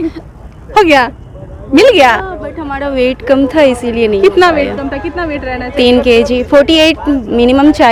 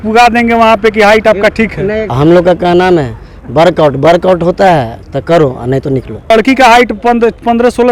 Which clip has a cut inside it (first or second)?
second